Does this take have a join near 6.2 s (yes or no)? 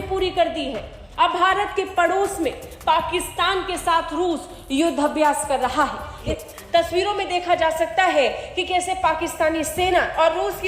yes